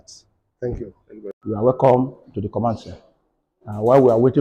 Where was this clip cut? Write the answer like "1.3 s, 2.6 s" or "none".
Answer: 1.0 s

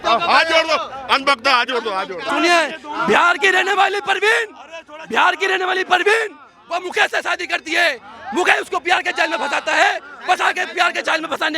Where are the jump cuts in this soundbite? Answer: 2.2 s

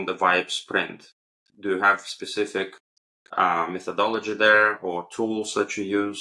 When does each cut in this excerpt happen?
none

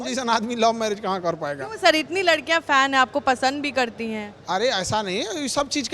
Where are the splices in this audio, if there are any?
none

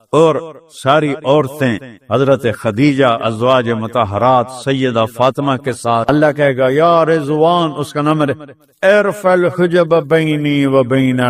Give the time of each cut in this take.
6.0 s

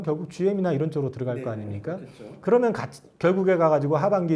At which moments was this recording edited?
none

